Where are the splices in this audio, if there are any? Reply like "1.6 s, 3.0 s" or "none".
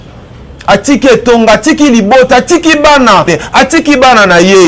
3.3 s